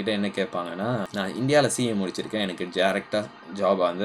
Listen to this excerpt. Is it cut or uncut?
cut